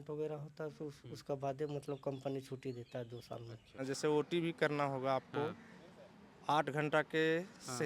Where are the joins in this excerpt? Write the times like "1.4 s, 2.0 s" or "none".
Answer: 3.7 s